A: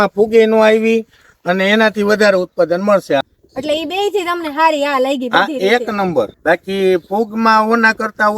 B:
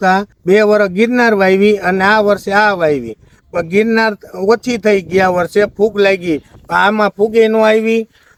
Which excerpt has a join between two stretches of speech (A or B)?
A